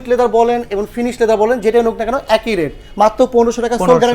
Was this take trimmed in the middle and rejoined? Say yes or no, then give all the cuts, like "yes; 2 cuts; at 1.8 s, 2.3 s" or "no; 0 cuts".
no; 0 cuts